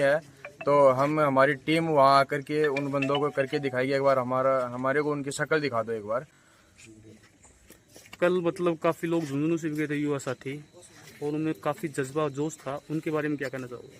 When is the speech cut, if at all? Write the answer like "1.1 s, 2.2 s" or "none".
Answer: none